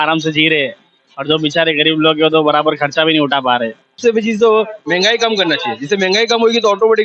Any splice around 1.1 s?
no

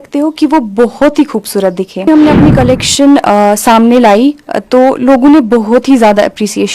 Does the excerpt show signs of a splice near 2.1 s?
yes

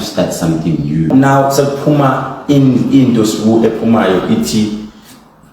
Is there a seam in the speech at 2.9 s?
no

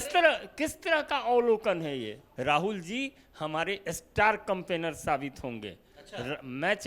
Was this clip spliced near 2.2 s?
yes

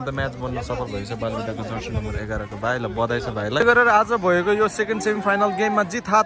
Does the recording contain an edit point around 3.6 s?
yes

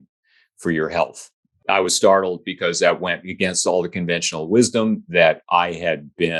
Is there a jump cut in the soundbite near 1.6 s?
yes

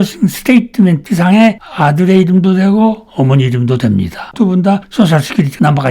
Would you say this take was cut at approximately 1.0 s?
yes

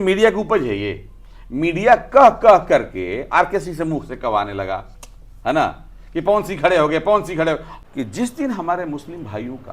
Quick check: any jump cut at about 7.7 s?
yes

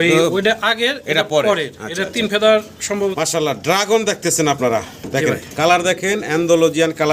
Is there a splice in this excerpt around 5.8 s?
no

